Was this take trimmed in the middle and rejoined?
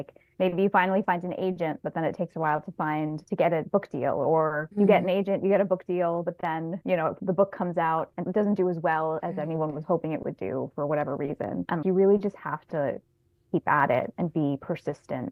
no; 0 cuts

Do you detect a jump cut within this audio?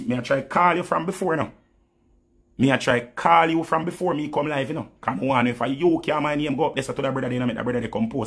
no; 0 cuts

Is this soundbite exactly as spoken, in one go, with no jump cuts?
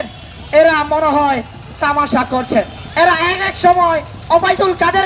no; 1 cut; at 2.8 s

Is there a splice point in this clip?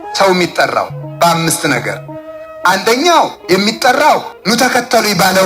no; 0 cuts

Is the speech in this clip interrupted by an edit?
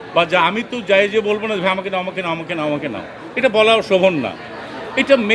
no; 0 cuts

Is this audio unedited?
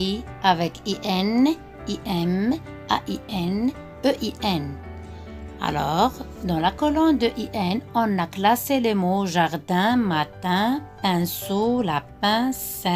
yes; 0 cuts

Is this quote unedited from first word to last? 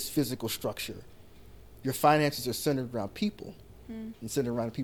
yes; 0 cuts

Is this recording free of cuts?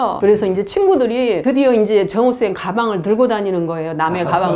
yes; 0 cuts

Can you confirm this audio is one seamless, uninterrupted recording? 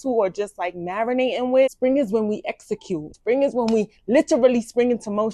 no; 2 cuts; at 1.7 s, 3.1 s

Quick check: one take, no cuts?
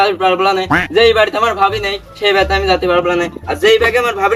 yes; 0 cuts

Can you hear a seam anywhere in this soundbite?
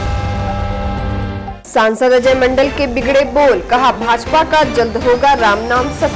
yes; 1 cut; at 1.6 s

